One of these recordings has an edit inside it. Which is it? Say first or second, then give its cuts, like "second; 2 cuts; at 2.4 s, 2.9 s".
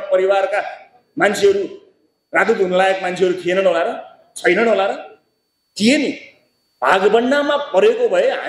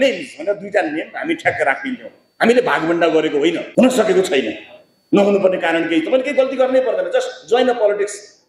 second; 1 cut; at 3.6 s